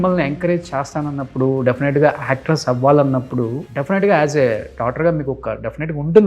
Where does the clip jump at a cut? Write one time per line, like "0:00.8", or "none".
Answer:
0:03.7